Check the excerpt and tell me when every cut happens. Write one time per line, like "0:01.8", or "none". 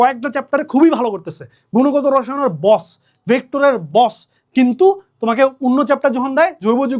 none